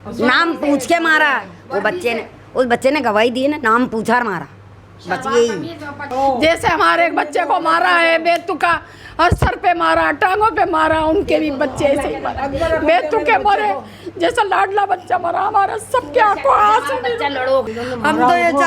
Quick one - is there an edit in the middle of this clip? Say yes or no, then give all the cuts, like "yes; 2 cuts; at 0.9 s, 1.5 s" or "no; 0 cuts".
yes; 2 cuts; at 6.1 s, 17.7 s